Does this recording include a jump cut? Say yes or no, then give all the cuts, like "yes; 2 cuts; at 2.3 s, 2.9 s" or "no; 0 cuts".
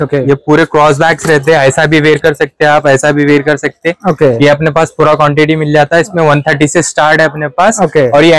no; 0 cuts